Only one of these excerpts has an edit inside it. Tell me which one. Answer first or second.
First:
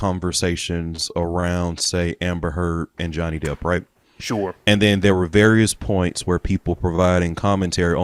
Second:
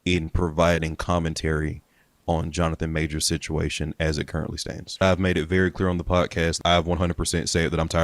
second